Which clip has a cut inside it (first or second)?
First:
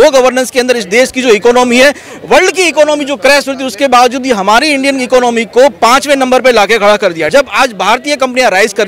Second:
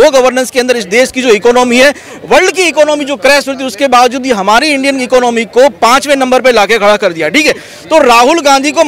first